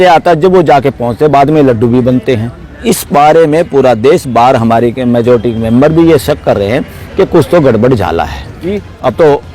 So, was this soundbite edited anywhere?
yes; 2 cuts; at 2.8 s, 8.7 s

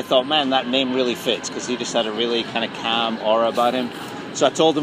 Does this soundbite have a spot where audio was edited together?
no; 0 cuts

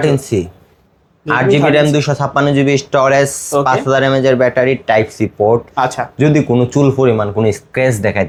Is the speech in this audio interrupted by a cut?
no; 0 cuts

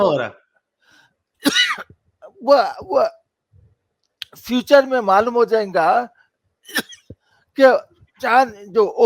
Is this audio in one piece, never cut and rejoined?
yes; 0 cuts

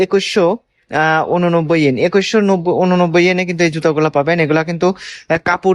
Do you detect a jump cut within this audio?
no; 0 cuts

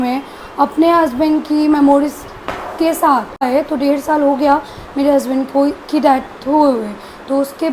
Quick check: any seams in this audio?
yes; 1 cut; at 3.4 s

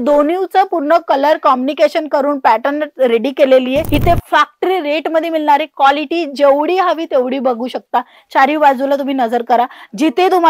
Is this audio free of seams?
no; 1 cut; at 3.9 s

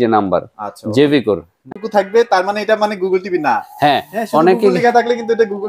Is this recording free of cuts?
no; 1 cut; at 1.5 s

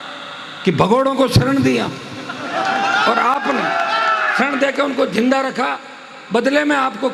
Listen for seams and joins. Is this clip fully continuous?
yes; 0 cuts

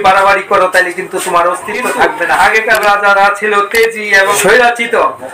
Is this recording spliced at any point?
yes; 2 cuts; at 2.4 s, 4.3 s

